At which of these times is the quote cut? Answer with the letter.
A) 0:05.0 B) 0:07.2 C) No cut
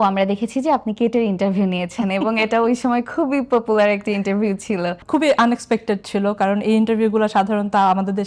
A